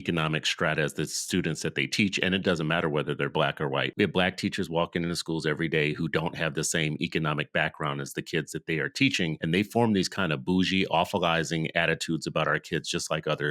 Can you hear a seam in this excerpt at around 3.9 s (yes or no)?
yes